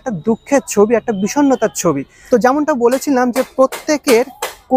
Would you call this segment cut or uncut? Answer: uncut